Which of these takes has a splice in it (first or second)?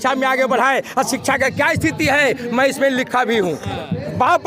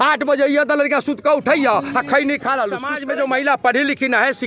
second